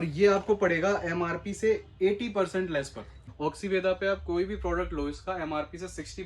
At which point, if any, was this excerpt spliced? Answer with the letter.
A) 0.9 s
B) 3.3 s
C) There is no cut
B